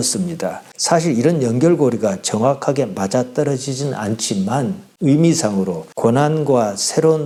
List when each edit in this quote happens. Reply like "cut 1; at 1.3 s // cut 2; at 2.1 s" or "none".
none

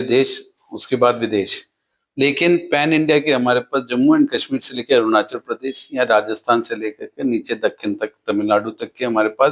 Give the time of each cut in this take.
none

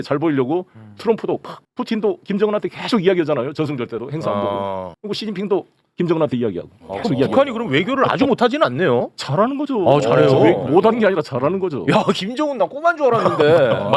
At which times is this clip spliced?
none

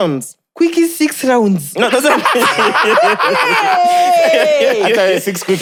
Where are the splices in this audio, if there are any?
none

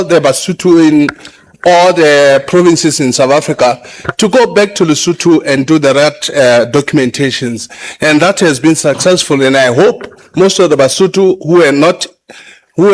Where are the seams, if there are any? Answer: none

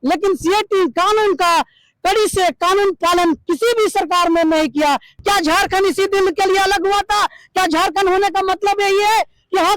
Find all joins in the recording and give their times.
cut 1; at 5.1 s

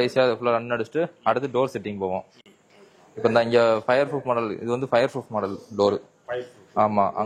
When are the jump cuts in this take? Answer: none

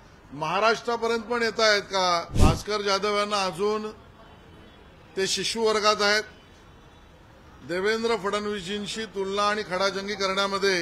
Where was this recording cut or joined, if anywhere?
cut 1; at 2.3 s

